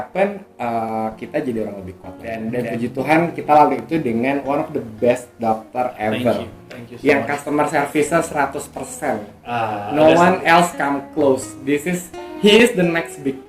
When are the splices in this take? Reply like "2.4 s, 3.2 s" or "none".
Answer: 2.4 s